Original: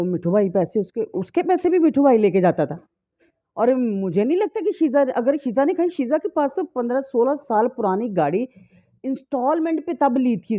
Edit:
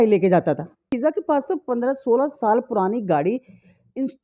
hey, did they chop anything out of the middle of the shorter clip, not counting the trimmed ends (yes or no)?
yes